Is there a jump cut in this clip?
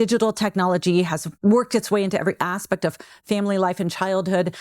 yes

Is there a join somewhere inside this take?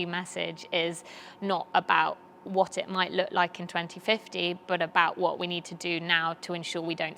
no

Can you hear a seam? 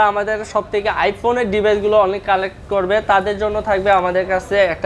no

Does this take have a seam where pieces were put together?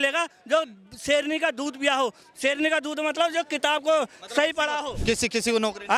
no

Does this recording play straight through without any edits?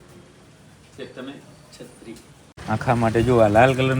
no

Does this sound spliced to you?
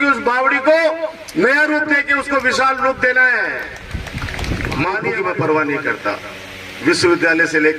yes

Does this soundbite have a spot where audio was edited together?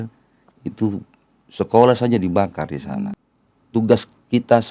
yes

